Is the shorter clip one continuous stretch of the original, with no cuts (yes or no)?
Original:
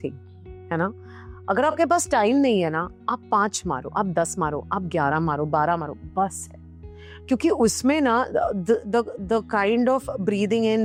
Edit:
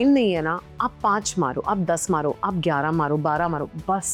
yes